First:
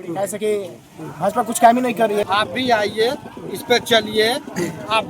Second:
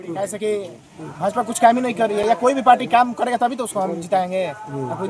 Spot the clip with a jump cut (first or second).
first